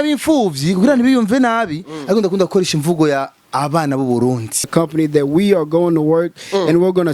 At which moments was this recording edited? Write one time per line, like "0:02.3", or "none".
0:04.7